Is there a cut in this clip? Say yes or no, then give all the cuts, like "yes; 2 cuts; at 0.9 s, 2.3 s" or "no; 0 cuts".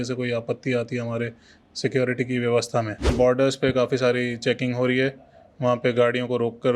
yes; 1 cut; at 3.1 s